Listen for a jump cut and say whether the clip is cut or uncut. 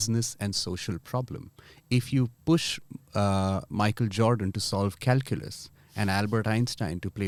uncut